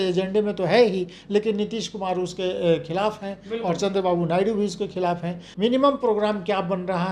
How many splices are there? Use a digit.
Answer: 1